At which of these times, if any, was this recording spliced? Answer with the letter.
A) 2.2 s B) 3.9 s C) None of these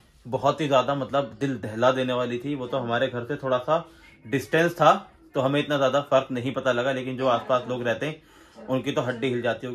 C